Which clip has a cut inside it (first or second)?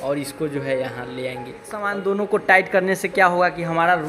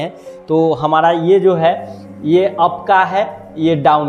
first